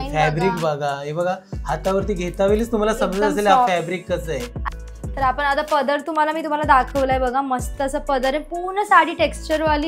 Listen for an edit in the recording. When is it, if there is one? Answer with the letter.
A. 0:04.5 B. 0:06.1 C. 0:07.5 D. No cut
A